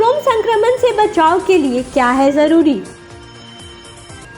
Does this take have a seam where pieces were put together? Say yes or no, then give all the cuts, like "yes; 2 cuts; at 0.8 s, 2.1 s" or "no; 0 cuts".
no; 0 cuts